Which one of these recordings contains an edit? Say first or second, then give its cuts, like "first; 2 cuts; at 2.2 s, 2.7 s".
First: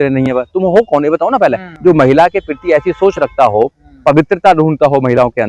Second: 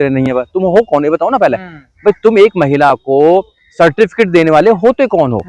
first; 1 cut; at 1.7 s